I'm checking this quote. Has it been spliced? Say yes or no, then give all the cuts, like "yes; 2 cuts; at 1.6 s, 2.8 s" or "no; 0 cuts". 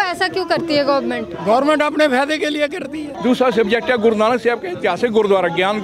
yes; 1 cut; at 3.1 s